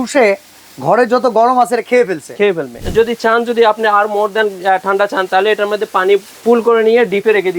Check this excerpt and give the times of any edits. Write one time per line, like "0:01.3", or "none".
0:02.7
0:06.3